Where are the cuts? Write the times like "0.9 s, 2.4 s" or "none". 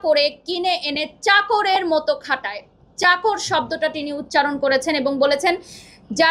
none